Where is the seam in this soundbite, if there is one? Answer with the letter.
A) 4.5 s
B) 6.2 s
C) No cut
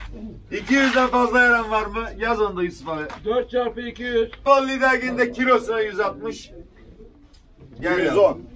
A